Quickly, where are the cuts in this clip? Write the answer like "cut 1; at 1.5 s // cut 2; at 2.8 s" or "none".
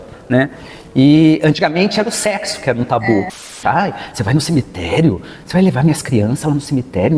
cut 1; at 3.5 s